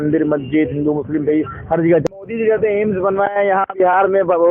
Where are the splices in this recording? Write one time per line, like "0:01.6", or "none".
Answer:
0:02.1

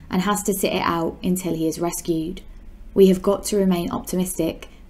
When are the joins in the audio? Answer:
none

